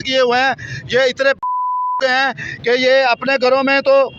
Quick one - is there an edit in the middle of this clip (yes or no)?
no